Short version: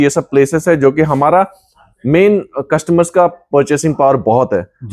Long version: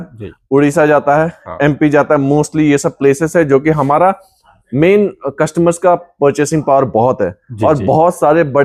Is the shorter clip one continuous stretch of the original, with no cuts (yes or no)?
yes